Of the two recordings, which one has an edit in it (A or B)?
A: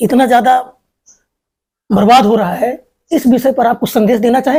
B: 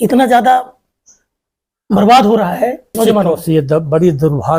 B